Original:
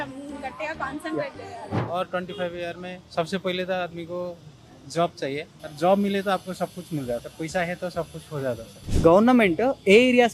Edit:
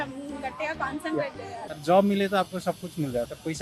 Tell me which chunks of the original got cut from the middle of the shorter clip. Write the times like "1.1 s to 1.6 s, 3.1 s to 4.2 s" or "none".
1.6 s to 5.5 s